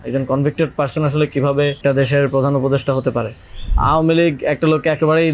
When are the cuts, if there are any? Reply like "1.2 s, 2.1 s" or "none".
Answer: 1.8 s, 3.7 s